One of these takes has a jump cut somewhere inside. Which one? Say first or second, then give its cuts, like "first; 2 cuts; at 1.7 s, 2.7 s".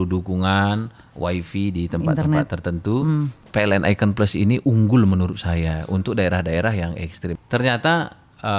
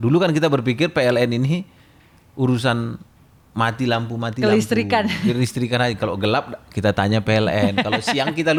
first; 2 cuts; at 3.4 s, 7.3 s